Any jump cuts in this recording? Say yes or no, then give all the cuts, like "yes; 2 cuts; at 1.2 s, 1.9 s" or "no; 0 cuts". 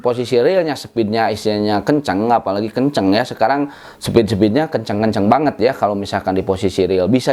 no; 0 cuts